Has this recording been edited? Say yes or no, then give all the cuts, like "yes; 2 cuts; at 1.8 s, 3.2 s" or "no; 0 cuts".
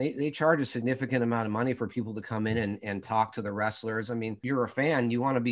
yes; 1 cut; at 4.3 s